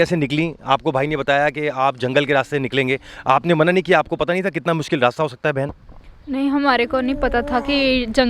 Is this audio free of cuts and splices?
yes; 0 cuts

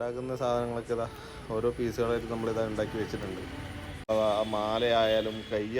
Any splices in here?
yes; 1 cut; at 4.1 s

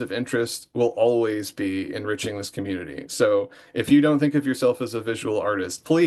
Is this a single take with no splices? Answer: yes; 0 cuts

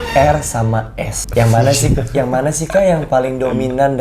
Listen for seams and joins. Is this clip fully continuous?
no; 1 cut; at 1.2 s

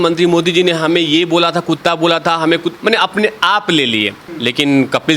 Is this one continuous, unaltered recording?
no; 1 cut; at 4.2 s

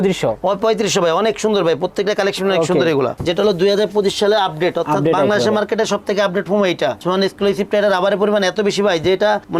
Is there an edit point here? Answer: yes; 2 cuts; at 3.2 s, 7.0 s

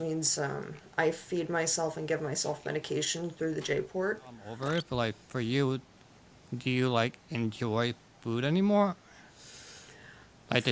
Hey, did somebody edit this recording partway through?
yes; 1 cut; at 4.5 s

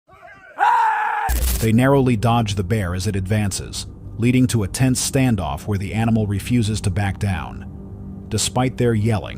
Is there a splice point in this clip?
yes; 1 cut; at 1.3 s

